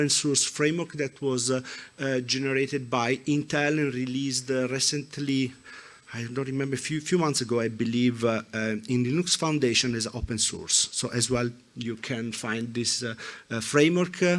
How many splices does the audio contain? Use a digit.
0